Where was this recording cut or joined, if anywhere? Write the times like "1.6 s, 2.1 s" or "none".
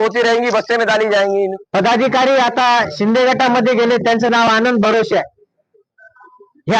1.6 s